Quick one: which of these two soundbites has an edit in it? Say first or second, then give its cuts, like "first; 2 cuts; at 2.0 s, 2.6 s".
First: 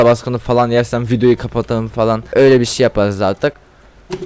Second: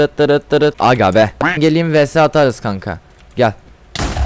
second; 1 cut; at 1.5 s